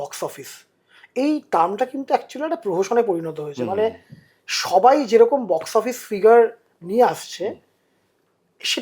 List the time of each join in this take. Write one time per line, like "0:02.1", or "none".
none